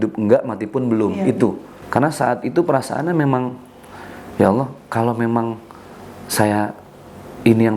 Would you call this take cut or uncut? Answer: cut